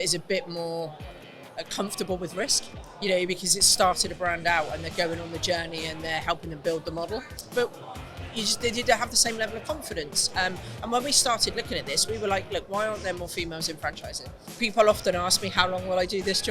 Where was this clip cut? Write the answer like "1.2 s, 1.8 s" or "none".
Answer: 7.3 s, 14.4 s